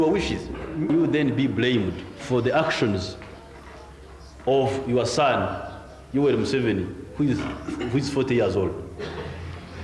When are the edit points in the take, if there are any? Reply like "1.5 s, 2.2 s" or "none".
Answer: none